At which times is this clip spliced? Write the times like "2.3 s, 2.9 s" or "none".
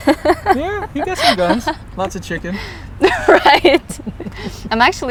none